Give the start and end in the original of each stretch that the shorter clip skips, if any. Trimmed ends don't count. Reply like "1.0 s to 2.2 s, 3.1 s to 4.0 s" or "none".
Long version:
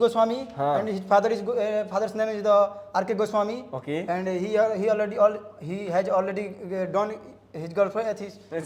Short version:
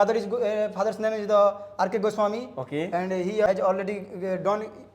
4.6 s to 6.0 s